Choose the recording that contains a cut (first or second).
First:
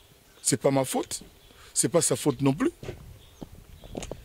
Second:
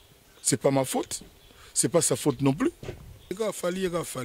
second